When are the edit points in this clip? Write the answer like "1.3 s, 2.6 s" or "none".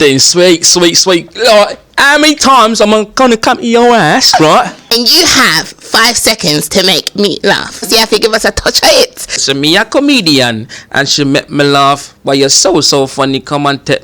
4.8 s, 7.9 s, 9.4 s